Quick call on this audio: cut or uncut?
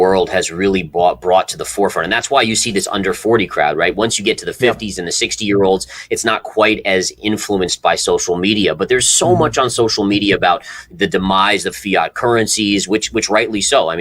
uncut